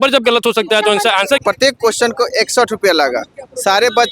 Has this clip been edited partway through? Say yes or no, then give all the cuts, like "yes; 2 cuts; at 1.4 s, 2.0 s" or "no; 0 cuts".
yes; 1 cut; at 1.4 s